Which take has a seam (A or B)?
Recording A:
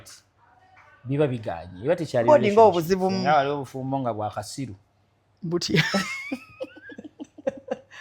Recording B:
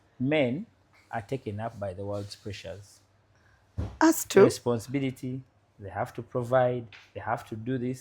A